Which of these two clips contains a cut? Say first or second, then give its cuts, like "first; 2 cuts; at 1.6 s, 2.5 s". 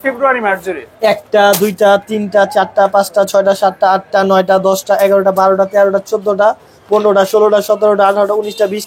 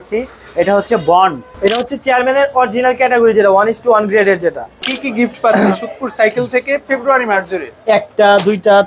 second; 2 cuts; at 1.5 s, 5.0 s